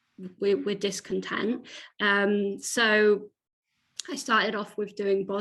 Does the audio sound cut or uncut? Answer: uncut